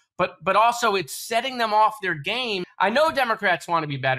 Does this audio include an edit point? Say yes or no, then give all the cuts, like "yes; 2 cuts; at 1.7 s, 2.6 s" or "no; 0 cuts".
yes; 1 cut; at 2.7 s